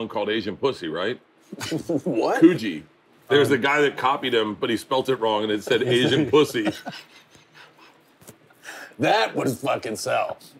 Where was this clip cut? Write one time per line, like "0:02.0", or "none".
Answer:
0:03.2

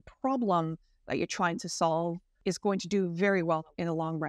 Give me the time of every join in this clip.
0:02.3

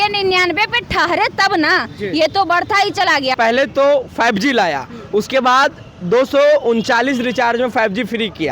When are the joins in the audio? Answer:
0:03.3

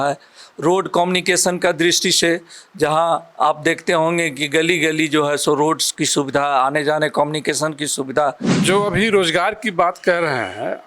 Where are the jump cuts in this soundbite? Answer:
0:08.5

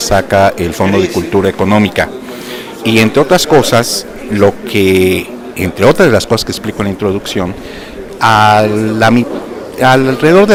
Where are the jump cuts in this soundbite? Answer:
none

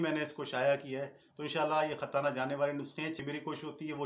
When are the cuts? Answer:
0:03.1

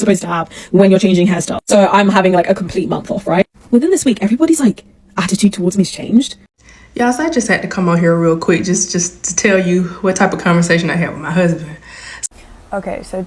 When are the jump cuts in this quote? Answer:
0:06.4
0:12.3

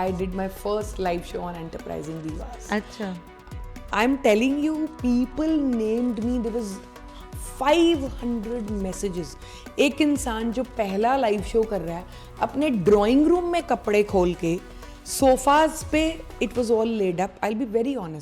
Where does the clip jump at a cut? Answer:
none

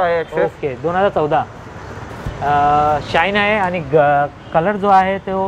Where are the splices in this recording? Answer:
none

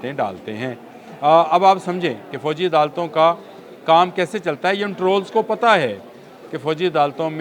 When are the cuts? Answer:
none

